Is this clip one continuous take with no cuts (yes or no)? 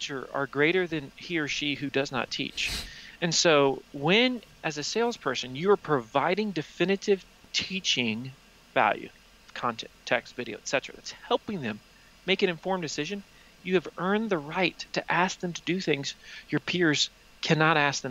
yes